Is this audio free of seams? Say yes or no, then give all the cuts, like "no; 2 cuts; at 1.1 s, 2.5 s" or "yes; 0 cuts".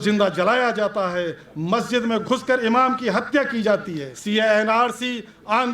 no; 1 cut; at 4.1 s